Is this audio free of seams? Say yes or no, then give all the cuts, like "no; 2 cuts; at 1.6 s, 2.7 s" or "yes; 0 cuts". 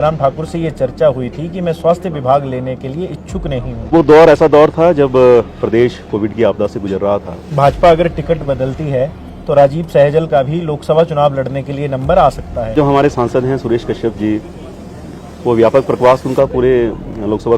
no; 3 cuts; at 3.9 s, 7.4 s, 12.8 s